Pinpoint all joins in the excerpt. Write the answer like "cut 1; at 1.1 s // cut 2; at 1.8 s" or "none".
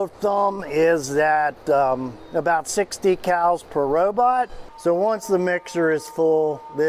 cut 1; at 4.6 s